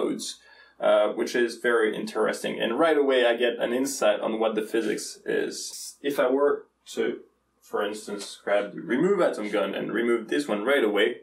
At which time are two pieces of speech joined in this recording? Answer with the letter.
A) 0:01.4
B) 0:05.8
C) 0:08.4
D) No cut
B